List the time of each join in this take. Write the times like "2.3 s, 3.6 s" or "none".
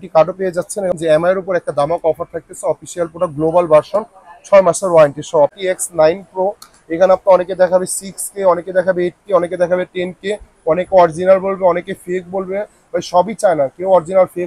0.9 s, 5.6 s